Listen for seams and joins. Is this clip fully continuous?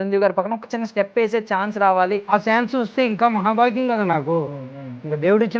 no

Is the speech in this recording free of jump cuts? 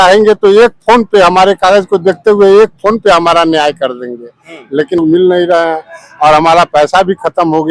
no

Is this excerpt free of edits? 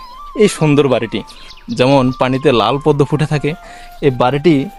yes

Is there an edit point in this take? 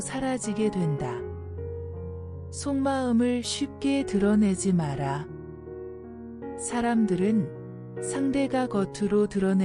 yes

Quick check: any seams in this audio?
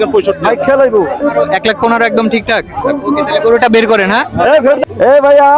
yes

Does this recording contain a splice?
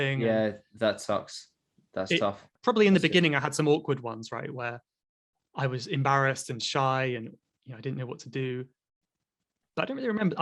yes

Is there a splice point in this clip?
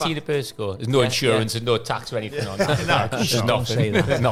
no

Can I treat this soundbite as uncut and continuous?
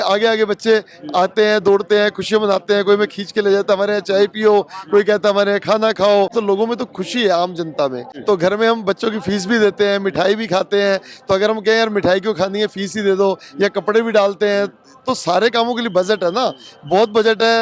no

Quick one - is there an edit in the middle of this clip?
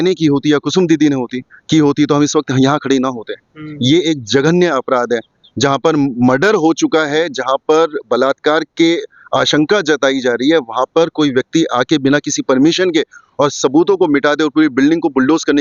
no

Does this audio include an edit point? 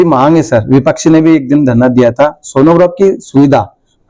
no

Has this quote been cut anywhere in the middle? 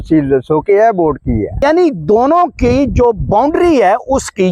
yes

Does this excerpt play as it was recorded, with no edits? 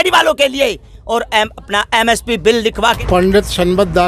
no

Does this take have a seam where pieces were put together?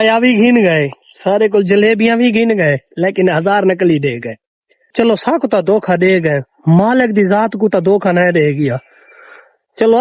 yes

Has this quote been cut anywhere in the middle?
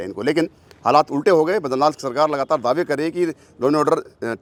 no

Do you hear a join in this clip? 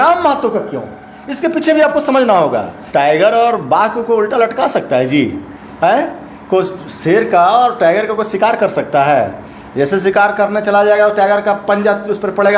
yes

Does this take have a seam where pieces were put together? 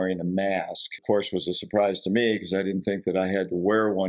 yes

